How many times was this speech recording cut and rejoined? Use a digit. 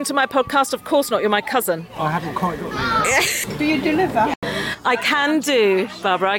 1